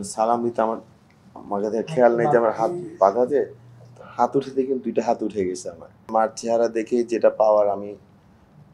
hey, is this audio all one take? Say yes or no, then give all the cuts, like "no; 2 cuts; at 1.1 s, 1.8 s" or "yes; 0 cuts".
no; 1 cut; at 6.1 s